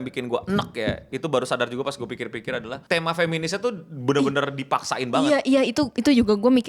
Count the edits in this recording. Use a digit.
1